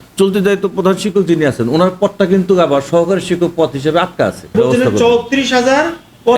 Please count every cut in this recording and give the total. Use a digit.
1